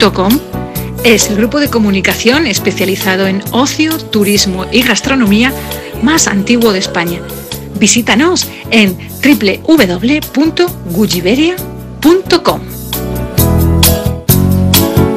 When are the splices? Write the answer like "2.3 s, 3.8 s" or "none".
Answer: 14.2 s